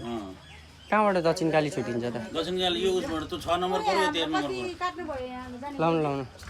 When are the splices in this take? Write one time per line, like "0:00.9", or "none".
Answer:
none